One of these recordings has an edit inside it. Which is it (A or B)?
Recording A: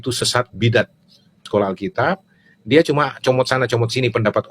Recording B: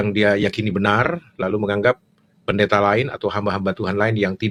A